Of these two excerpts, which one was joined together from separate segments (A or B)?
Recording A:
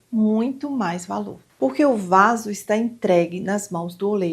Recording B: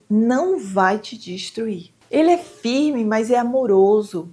A